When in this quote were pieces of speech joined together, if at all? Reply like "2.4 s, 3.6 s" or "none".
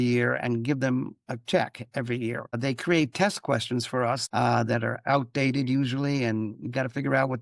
2.4 s, 4.2 s